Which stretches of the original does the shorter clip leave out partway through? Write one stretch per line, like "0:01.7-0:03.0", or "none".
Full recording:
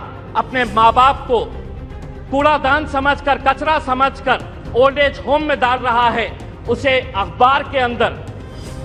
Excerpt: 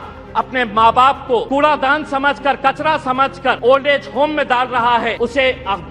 0:01.5-0:02.3
0:04.4-0:04.7
0:06.2-0:06.6

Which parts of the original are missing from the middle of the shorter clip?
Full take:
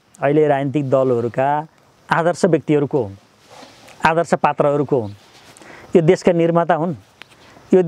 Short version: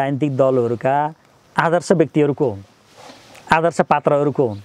none

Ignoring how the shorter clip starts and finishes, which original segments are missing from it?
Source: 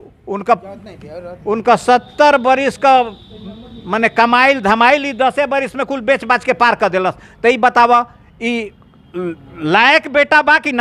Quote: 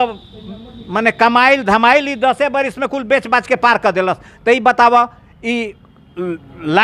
none

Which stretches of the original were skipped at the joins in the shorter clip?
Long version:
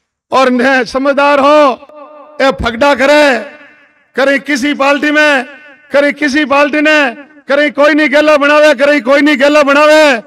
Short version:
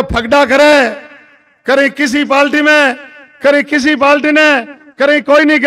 none

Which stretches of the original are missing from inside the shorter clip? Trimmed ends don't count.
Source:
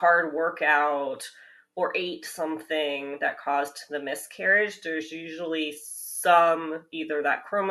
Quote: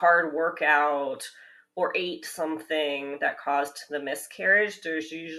none

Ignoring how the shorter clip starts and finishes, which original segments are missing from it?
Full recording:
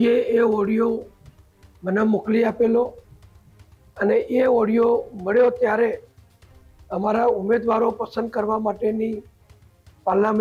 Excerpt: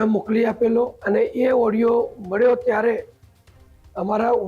0:03.0-0:03.9

